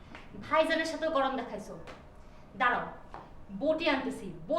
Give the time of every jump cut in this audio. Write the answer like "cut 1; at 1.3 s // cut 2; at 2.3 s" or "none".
none